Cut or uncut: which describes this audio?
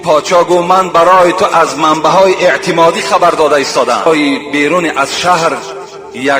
cut